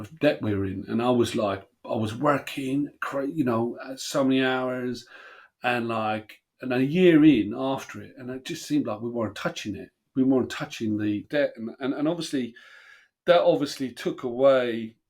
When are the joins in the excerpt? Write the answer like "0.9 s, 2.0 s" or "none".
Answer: 11.2 s